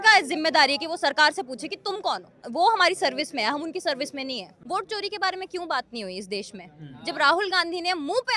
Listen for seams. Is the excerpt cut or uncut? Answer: cut